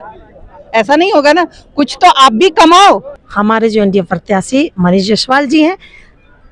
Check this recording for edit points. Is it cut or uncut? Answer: cut